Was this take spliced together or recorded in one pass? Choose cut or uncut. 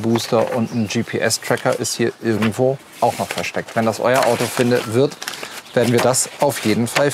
uncut